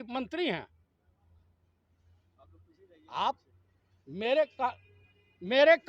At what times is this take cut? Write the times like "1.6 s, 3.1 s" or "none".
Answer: none